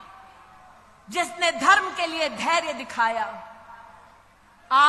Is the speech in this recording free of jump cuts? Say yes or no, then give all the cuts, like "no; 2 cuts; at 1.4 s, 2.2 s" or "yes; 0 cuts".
yes; 0 cuts